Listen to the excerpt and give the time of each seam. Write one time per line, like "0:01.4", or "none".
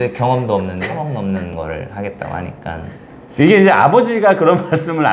0:01.5